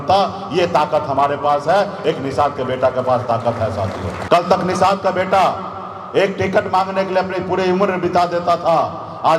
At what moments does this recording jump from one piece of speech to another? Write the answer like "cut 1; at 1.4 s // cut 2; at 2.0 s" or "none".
cut 1; at 4.1 s